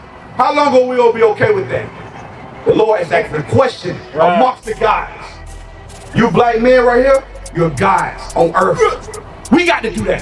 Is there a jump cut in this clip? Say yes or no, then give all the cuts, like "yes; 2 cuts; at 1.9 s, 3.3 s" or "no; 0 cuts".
yes; 1 cut; at 8.8 s